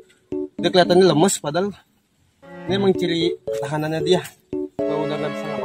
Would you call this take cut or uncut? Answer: uncut